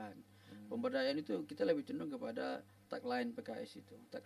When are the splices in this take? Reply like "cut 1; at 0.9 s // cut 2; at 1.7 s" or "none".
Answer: none

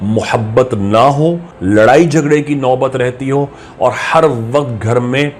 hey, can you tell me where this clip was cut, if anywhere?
cut 1; at 1.5 s

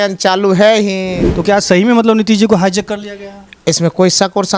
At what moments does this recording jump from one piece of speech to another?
cut 1; at 1.3 s

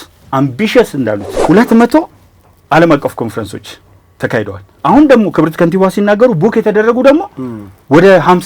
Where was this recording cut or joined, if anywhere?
cut 1; at 1.3 s

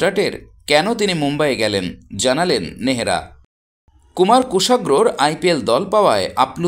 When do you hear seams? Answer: cut 1; at 3.4 s

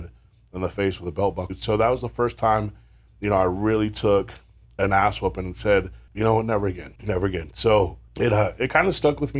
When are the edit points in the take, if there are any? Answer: cut 1; at 1.5 s // cut 2; at 6.0 s // cut 3; at 6.9 s // cut 4; at 8.0 s

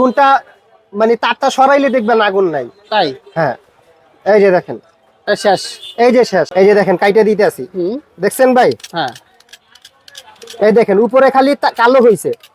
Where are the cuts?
cut 1; at 6.5 s

